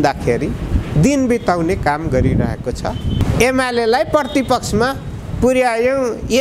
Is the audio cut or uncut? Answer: cut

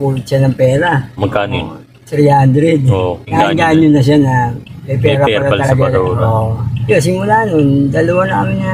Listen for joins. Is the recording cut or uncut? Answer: uncut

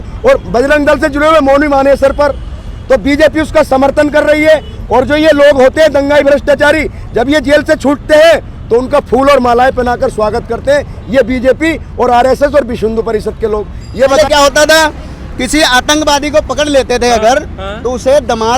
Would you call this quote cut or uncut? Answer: cut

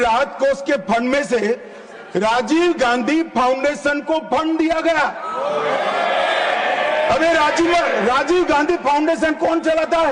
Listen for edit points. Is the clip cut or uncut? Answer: uncut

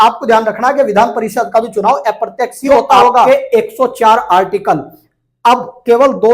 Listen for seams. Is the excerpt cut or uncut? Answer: cut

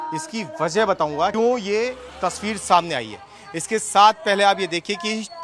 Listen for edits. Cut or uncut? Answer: cut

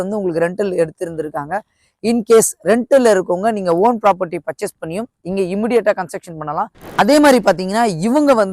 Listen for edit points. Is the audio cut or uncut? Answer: cut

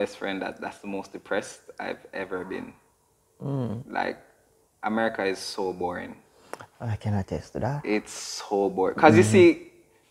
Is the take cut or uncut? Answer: uncut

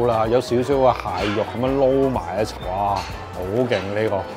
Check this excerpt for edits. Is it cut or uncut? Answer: uncut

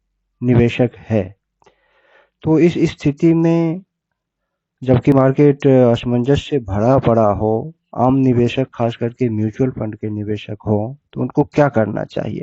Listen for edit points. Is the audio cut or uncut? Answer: cut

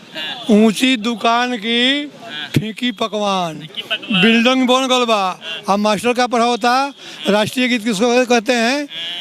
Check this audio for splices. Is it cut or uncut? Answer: uncut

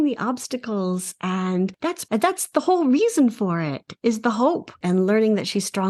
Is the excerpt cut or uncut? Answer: cut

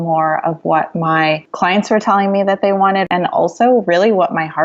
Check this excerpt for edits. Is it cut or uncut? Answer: cut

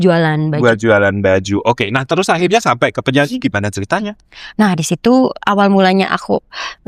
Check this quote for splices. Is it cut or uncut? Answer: uncut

